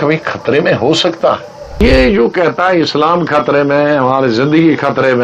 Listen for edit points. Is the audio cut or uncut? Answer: cut